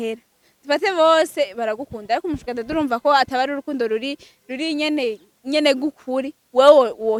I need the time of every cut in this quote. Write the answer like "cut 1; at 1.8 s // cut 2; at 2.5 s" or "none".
none